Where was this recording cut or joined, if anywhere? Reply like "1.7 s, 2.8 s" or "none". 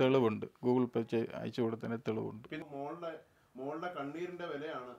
2.6 s